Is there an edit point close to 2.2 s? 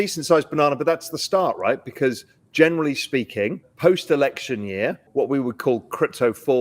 no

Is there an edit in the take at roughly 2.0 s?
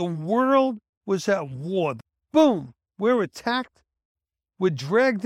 yes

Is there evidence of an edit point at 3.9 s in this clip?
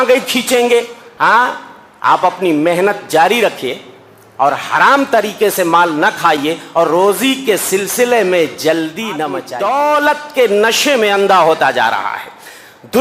no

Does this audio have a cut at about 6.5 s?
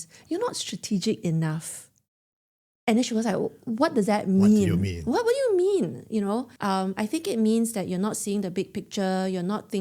yes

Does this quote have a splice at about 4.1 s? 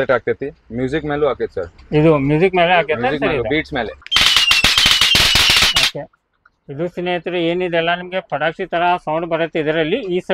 yes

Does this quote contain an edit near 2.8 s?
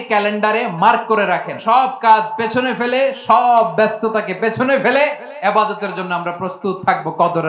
no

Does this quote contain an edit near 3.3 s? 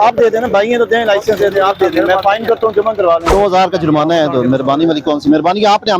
yes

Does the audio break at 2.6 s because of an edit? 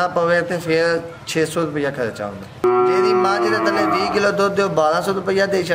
yes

